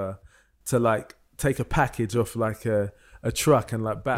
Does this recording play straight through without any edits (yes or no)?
yes